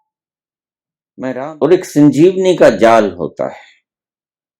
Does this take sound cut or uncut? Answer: cut